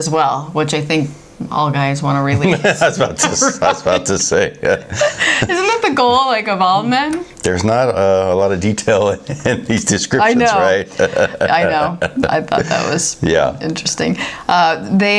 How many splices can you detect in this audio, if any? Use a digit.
0